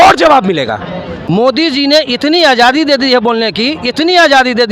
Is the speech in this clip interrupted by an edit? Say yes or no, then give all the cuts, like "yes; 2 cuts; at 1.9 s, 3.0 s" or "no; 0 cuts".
yes; 1 cut; at 1.2 s